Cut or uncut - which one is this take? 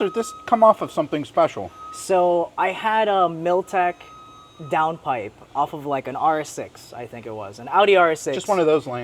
uncut